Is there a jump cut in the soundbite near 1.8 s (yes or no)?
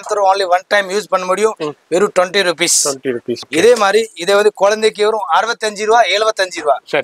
no